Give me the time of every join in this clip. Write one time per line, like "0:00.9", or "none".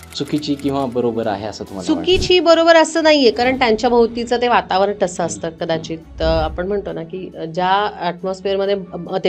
none